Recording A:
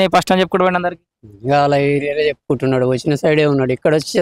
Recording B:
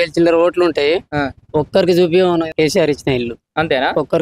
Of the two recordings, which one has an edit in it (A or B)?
B